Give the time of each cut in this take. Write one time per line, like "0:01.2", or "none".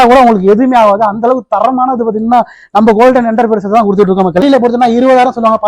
0:04.4

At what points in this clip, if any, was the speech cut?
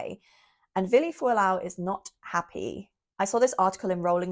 none

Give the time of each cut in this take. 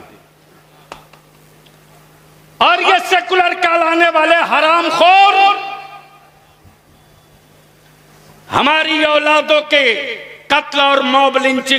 none

